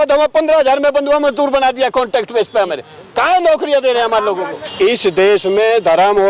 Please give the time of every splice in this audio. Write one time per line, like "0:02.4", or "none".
0:04.6